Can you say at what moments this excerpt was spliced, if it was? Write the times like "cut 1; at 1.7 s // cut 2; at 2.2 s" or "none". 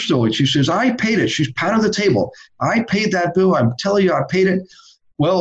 none